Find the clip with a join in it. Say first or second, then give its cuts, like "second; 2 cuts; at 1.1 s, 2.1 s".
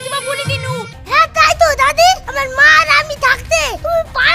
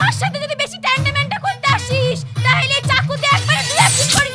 first; 1 cut; at 1.0 s